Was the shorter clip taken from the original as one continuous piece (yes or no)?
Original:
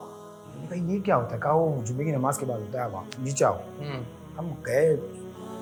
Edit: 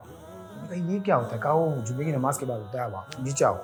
yes